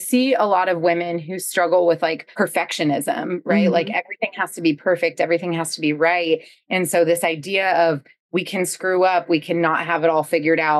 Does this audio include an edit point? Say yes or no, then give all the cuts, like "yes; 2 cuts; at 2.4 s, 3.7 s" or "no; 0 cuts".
yes; 1 cut; at 2.2 s